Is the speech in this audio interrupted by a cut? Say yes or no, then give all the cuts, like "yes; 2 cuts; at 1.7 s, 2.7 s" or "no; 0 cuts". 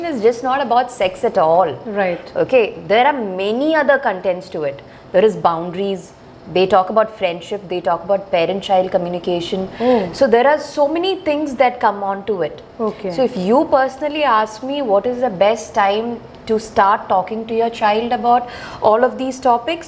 no; 0 cuts